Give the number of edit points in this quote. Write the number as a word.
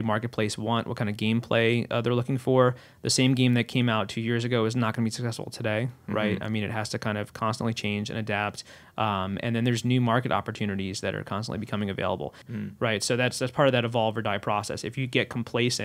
one